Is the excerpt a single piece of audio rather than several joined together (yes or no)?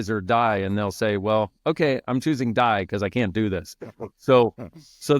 yes